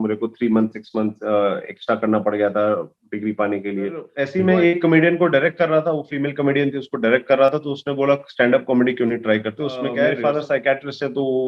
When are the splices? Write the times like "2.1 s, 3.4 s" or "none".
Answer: 4.2 s, 10.1 s